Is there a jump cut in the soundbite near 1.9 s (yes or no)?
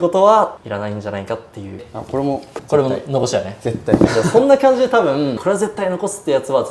yes